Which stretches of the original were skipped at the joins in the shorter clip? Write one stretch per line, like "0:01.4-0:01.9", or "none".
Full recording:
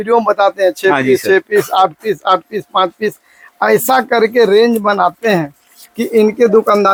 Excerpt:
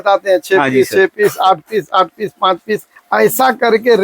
0:03.3-0:03.4